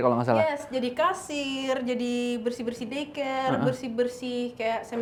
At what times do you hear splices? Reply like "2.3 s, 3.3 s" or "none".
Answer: none